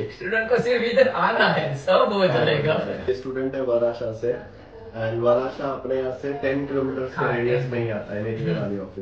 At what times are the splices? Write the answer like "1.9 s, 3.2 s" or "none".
3.0 s

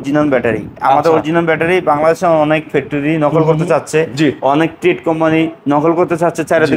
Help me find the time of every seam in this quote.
none

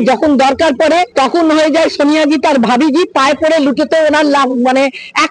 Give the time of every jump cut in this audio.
1.1 s

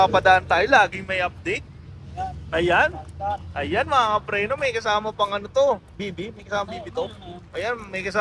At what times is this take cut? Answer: none

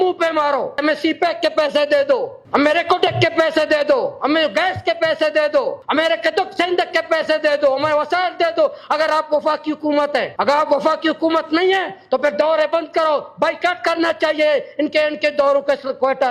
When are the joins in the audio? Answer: 0.8 s, 2.4 s, 5.8 s, 10.3 s

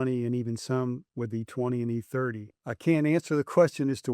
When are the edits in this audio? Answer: 2.6 s

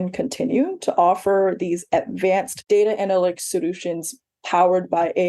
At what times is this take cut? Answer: 2.5 s

